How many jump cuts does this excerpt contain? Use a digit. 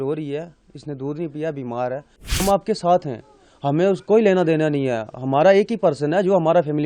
1